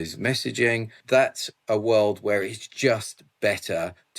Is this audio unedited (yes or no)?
no